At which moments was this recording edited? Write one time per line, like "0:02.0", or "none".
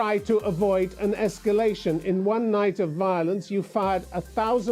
none